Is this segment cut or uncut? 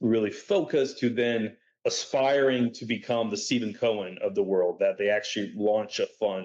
uncut